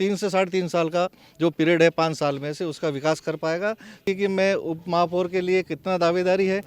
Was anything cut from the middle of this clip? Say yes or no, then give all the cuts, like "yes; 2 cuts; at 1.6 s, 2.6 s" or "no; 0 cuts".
yes; 1 cut; at 4.0 s